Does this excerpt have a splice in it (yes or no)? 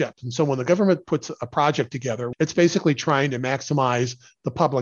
yes